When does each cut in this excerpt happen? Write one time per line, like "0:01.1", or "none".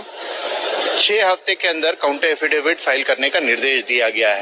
none